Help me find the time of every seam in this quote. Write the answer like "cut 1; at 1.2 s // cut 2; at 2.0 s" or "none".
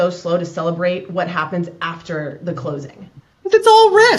none